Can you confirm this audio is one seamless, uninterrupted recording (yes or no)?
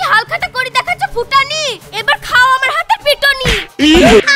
yes